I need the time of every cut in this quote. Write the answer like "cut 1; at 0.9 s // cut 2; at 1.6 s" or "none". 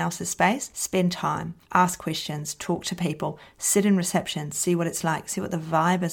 none